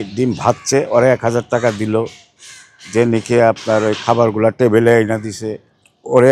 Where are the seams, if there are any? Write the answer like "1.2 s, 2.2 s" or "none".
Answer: none